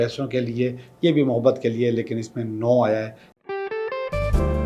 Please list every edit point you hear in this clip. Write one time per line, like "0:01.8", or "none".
0:03.2

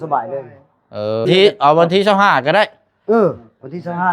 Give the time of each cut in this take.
0:01.3

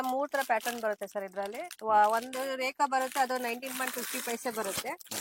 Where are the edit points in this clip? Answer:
none

